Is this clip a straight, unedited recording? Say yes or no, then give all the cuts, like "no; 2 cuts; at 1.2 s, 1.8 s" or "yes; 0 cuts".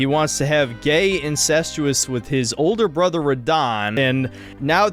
no; 2 cuts; at 2.0 s, 4.0 s